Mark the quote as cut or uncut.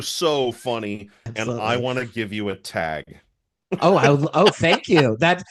cut